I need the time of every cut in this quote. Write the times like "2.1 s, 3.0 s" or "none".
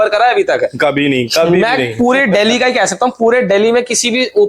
none